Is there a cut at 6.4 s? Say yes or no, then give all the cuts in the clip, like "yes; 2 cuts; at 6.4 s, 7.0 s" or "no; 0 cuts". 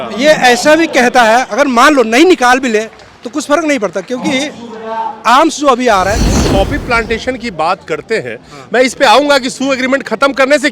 yes; 1 cut; at 6.4 s